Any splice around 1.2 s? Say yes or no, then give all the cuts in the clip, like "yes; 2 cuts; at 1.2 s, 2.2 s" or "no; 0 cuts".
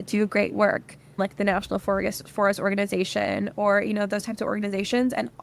yes; 1 cut; at 1.2 s